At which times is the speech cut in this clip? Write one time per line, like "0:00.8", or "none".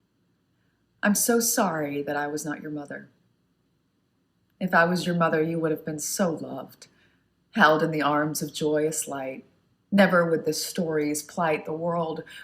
0:03.1